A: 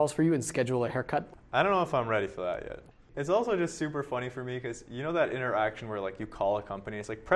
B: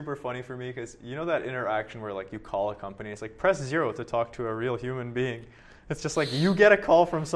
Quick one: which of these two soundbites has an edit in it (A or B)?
A